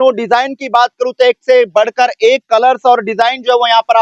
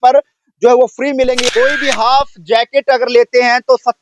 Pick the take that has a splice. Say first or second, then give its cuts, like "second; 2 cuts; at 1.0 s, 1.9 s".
second; 1 cut; at 1.4 s